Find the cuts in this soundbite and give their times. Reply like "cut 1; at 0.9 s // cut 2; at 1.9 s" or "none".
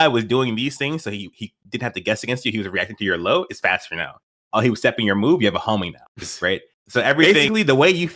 cut 1; at 7.2 s